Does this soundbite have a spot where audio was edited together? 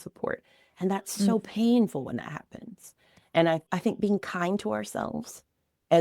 yes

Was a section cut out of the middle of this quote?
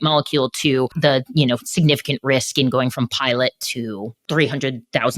yes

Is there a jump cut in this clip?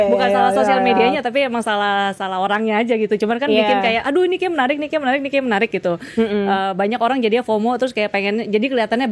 no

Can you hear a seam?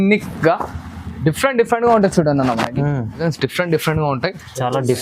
yes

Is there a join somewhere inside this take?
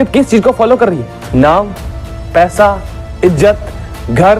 yes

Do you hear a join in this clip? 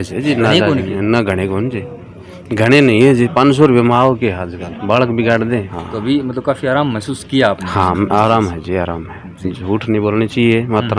yes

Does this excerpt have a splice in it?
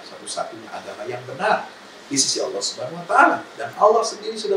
no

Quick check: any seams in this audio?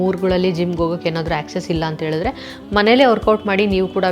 no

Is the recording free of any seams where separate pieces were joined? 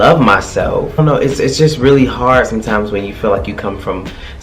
no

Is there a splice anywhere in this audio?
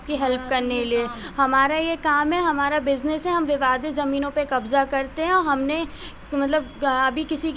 no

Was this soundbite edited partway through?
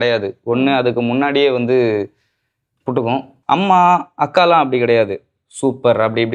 yes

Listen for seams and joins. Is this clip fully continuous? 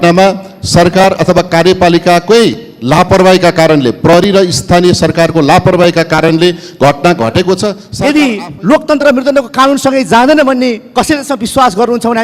no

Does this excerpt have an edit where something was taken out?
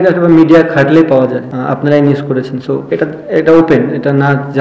yes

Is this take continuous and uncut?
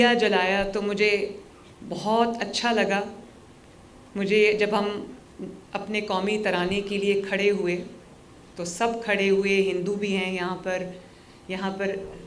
yes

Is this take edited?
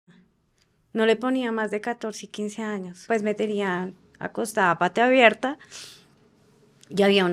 yes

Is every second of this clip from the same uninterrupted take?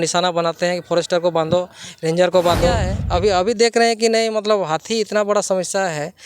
no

